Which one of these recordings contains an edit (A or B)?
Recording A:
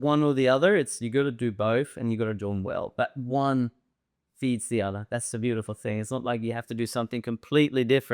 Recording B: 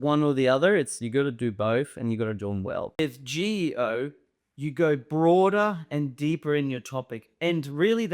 B